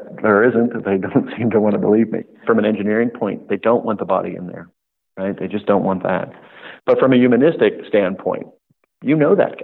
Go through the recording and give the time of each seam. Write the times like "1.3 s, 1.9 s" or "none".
2.4 s

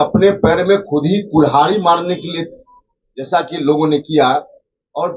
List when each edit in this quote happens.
none

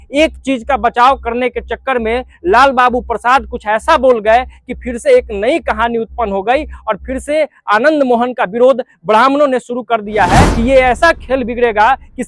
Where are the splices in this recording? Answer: 10.5 s

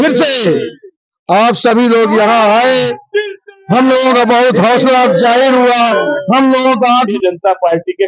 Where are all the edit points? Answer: 7.1 s

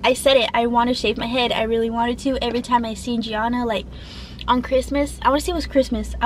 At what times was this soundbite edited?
none

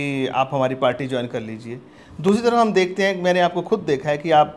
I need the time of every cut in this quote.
none

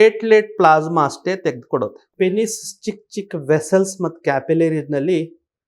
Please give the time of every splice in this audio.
2.0 s

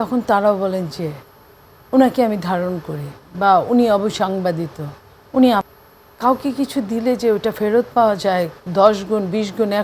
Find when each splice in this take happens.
5.7 s

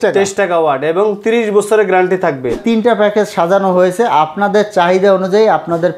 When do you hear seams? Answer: 2.6 s

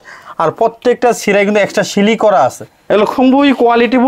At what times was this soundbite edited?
2.7 s

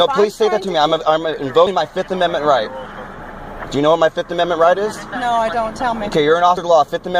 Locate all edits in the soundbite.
1.7 s

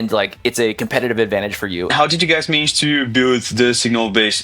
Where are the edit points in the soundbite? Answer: 1.9 s

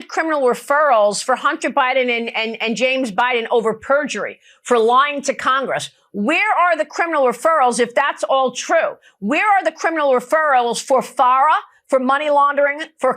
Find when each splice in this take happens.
none

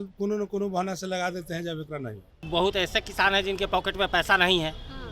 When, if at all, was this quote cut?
2.4 s

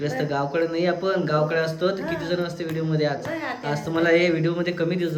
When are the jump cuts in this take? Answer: none

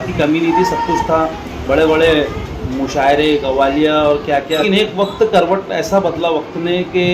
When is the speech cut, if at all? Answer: 4.6 s

